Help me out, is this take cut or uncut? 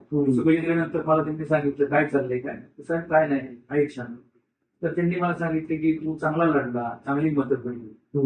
uncut